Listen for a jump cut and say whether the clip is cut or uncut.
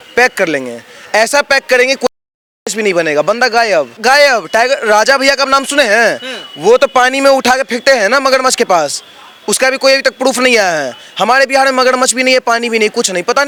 uncut